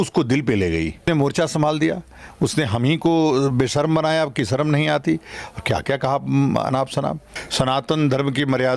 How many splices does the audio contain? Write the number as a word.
two